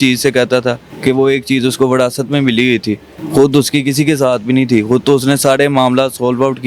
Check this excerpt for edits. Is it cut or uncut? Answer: cut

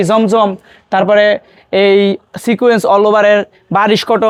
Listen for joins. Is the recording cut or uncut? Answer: uncut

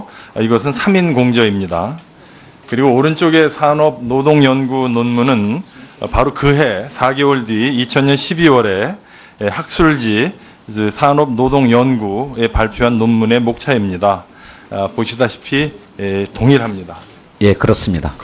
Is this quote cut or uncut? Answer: uncut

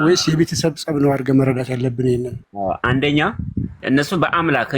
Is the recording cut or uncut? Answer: cut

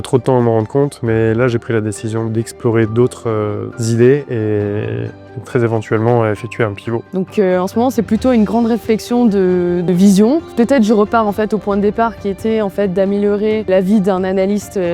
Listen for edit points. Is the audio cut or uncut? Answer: uncut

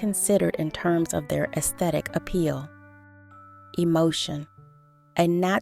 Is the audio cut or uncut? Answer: cut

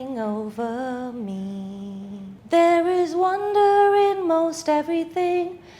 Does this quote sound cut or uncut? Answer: cut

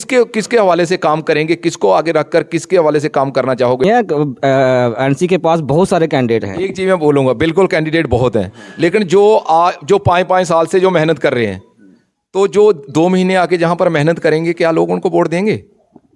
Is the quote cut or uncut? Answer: cut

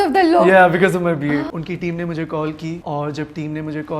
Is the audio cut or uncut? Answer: cut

